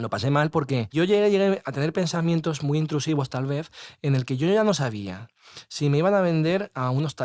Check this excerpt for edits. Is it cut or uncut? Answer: cut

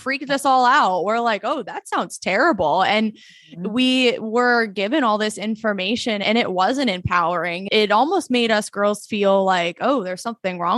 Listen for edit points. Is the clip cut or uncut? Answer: cut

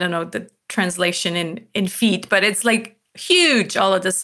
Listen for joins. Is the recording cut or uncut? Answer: uncut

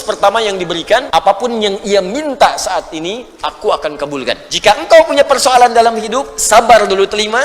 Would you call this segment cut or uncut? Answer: cut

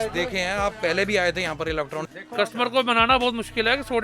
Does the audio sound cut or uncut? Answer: cut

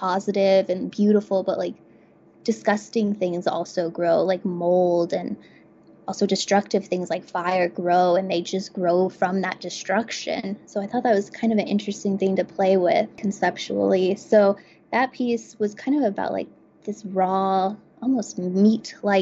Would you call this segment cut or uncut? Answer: uncut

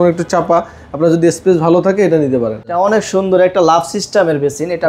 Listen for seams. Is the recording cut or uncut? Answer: cut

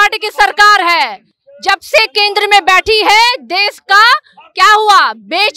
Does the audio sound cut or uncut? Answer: uncut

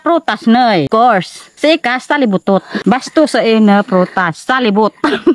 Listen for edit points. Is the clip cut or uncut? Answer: cut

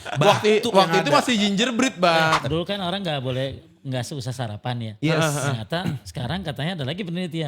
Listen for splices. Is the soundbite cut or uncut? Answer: cut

